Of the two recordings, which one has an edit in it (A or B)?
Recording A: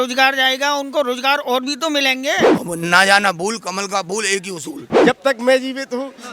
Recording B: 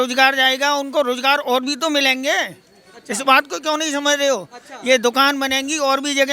A